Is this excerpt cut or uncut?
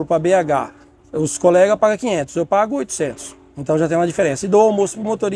uncut